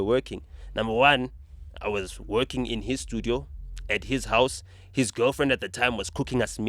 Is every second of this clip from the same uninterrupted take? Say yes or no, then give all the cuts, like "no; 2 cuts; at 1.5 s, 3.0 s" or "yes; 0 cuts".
yes; 0 cuts